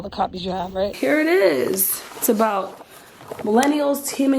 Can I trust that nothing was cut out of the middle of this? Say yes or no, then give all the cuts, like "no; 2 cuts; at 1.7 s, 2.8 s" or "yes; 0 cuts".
no; 1 cut; at 0.9 s